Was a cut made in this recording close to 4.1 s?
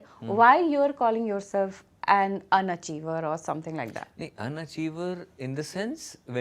no; 0 cuts

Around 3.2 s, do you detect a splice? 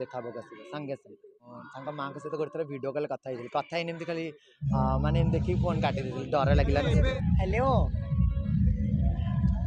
no; 2 cuts; at 1.5 s, 7.1 s

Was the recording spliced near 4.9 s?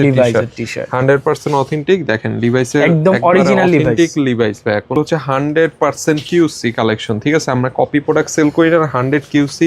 yes; 1 cut; at 4.9 s

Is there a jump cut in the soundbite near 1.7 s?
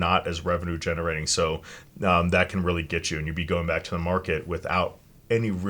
yes; 1 cut; at 1.7 s

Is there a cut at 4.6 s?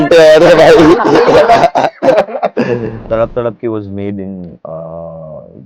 no; 1 cut; at 3.0 s

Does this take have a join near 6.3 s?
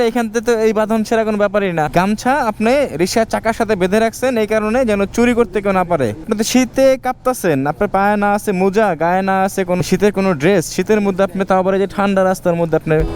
yes; 3 cuts; at 1.9 s, 6.3 s, 9.8 s

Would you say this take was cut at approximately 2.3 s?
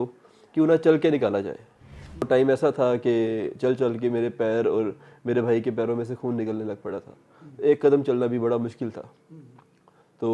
yes; 1 cut; at 2.3 s

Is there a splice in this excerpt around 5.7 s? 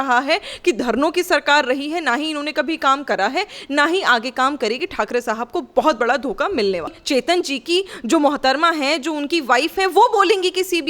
no; 1 cut; at 7.0 s

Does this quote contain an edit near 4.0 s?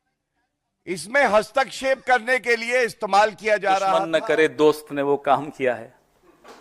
yes; 1 cut; at 4.0 s

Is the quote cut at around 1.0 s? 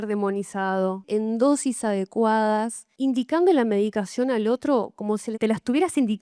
yes; 3 cuts; at 1.0 s, 2.9 s, 5.3 s

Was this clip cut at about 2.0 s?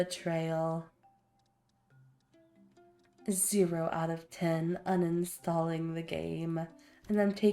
no; 0 cuts

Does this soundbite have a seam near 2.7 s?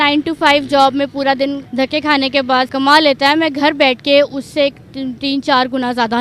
yes; 2 cuts; at 1.6 s, 2.7 s

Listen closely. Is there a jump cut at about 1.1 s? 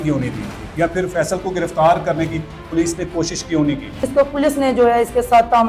no; 1 cut; at 3.9 s

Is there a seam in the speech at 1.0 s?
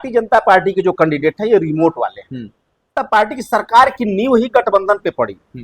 no; 1 cut; at 3.0 s

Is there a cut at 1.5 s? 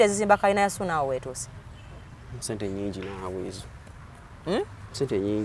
no; 0 cuts

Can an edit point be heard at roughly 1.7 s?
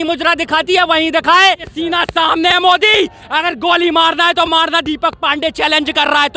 yes; 1 cut; at 1.7 s

